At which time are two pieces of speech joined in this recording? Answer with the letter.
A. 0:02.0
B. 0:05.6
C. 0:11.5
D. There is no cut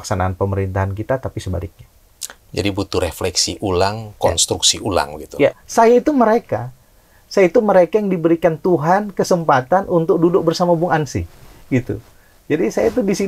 B